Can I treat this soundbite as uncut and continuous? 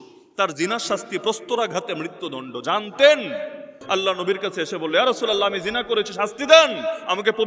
no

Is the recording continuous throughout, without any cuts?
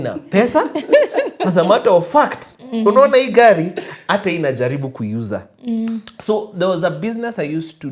yes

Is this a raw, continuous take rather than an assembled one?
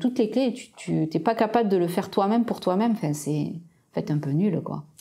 yes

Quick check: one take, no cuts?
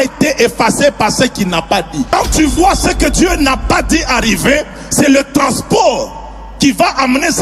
no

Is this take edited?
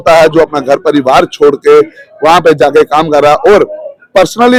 no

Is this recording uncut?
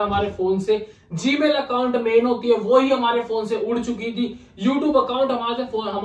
yes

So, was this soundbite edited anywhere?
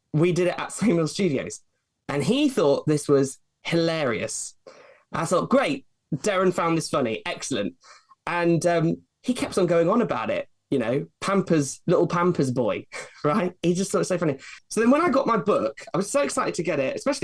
yes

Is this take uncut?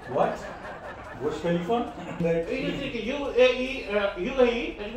no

